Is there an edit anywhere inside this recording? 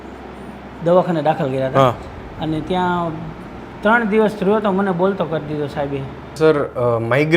yes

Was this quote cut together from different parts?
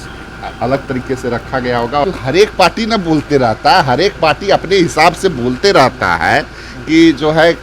yes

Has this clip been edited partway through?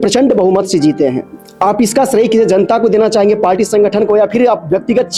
no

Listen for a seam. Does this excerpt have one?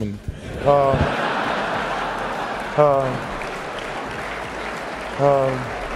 no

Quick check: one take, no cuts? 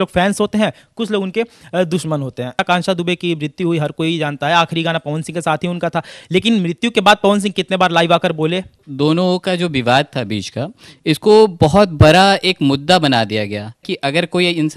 no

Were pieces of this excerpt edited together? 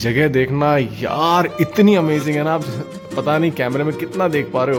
no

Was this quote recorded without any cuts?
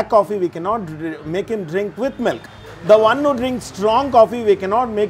yes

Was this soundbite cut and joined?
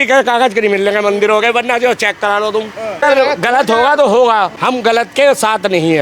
yes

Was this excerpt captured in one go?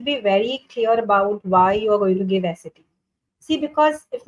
yes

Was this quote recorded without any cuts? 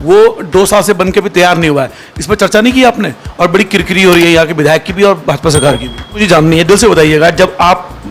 no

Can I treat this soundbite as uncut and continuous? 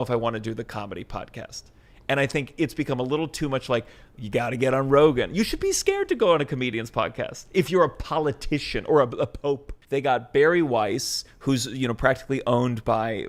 yes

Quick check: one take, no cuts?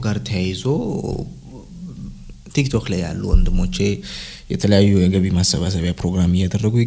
yes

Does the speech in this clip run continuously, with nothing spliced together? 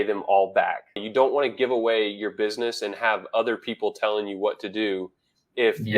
no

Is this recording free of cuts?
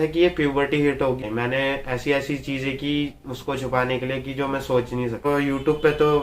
no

